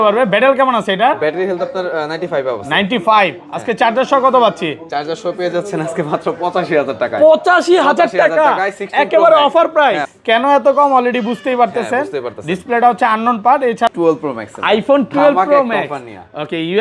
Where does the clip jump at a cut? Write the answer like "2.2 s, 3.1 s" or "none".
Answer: 10.1 s, 13.9 s